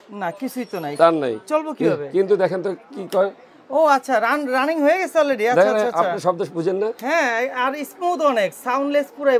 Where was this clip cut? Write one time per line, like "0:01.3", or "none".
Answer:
none